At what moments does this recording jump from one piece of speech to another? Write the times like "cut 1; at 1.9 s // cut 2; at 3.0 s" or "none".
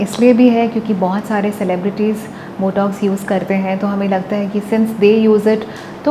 none